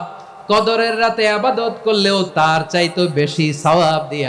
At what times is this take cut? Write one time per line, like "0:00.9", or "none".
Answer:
0:02.3